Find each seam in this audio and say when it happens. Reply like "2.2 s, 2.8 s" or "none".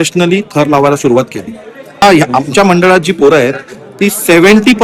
2.0 s